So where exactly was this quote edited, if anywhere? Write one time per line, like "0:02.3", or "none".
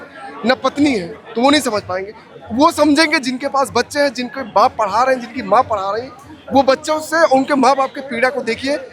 none